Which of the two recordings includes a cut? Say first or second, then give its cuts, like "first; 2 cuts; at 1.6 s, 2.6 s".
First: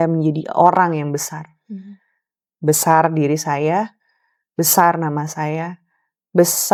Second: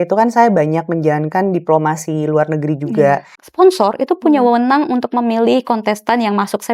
second; 1 cut; at 3.4 s